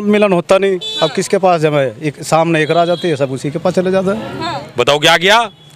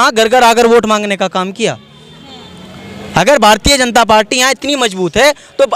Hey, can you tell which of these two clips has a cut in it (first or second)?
first